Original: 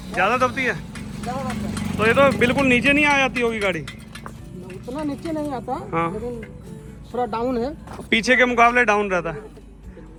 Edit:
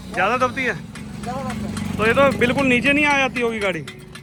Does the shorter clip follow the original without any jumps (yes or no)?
yes